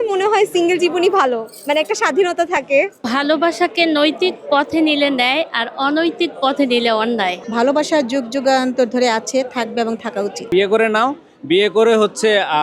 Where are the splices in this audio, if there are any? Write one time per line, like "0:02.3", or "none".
0:03.0
0:07.4
0:10.5